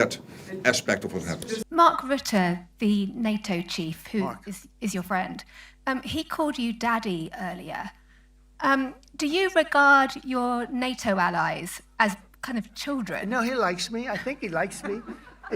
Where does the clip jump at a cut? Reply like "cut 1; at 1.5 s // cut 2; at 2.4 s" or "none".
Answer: cut 1; at 1.6 s

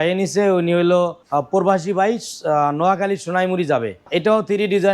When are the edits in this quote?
cut 1; at 1.2 s // cut 2; at 4.1 s

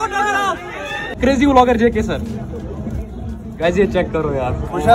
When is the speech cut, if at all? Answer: cut 1; at 1.2 s

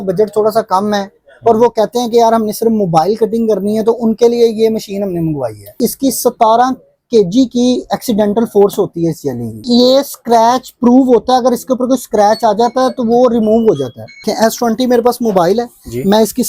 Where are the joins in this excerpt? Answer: cut 1; at 5.8 s // cut 2; at 9.6 s // cut 3; at 14.3 s

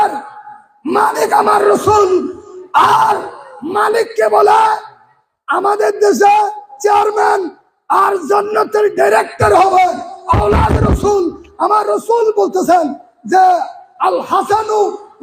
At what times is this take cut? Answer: none

